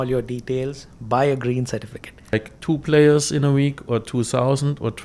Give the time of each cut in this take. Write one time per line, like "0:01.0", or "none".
0:02.5